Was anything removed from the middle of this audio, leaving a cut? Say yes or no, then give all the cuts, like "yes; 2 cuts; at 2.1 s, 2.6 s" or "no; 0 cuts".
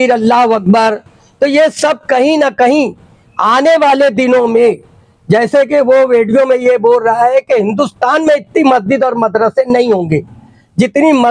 no; 0 cuts